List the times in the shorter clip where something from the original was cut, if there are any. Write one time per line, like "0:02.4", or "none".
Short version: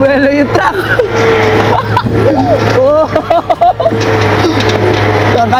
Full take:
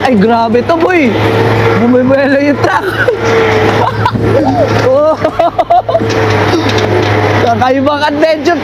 none